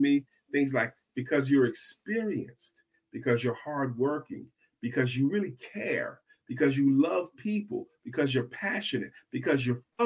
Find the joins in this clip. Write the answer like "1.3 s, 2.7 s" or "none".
none